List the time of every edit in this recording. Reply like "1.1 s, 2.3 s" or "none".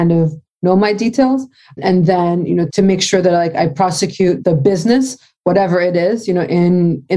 1.8 s, 2.7 s, 4.4 s